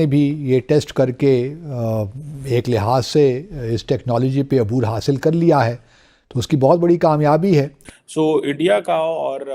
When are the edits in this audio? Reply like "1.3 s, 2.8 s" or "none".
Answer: 8.1 s